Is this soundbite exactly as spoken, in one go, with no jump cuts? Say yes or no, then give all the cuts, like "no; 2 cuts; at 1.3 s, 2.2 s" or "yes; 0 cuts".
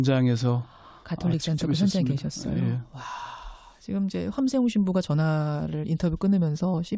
no; 1 cut; at 5.1 s